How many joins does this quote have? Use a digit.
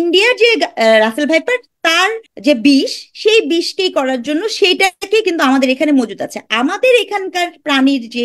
1